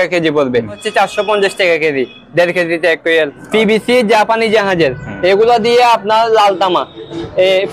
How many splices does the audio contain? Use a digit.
2